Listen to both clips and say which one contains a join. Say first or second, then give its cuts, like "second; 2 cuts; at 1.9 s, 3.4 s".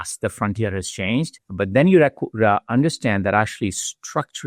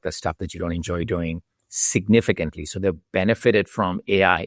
first; 1 cut; at 1.4 s